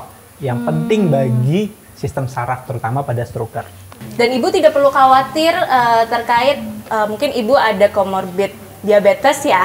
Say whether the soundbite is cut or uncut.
cut